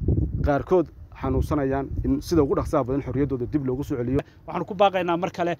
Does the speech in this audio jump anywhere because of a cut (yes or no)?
yes